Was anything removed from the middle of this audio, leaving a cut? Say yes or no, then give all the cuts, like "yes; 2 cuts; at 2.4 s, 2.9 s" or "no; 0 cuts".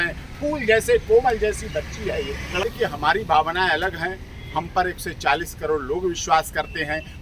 yes; 1 cut; at 2.6 s